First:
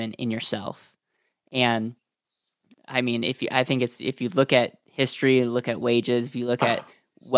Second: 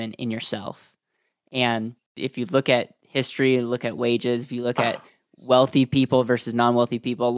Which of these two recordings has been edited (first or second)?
second